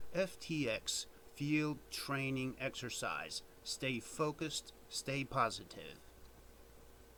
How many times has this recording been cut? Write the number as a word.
zero